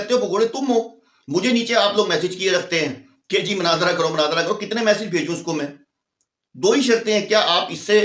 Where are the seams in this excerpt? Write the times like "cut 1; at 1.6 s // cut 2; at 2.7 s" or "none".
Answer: none